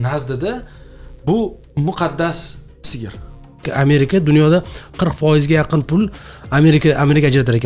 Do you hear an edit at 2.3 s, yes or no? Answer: no